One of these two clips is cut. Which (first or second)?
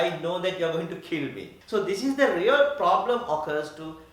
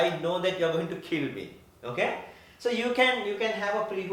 first